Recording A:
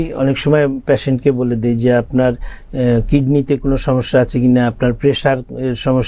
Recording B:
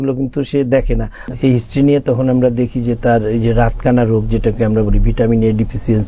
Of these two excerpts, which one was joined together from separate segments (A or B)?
B